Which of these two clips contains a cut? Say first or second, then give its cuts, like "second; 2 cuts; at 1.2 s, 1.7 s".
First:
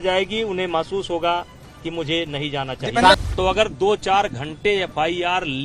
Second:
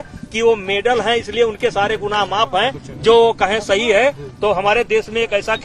first; 1 cut; at 3.1 s